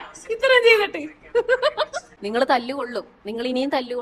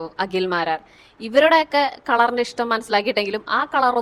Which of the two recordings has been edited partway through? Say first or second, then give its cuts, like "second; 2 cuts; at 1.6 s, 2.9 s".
first; 1 cut; at 2.1 s